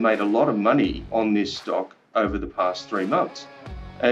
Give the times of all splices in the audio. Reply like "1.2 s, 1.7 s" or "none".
1.1 s